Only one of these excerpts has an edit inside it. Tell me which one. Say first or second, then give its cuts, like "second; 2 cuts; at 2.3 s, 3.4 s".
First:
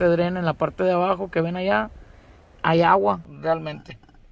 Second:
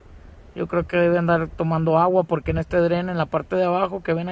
first; 1 cut; at 3.3 s